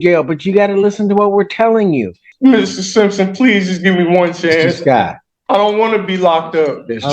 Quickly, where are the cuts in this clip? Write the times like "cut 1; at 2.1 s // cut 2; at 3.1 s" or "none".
cut 1; at 2.2 s